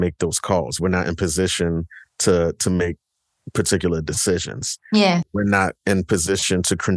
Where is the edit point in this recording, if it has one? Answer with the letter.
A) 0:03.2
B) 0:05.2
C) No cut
B